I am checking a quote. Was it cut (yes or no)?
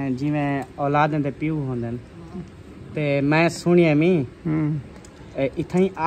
no